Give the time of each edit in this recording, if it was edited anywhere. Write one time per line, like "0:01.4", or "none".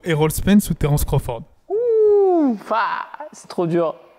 none